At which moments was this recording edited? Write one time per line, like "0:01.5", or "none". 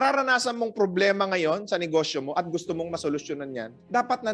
none